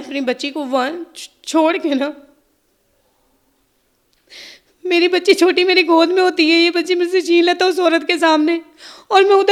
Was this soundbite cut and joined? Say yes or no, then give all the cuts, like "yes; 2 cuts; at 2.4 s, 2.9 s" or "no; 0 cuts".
no; 0 cuts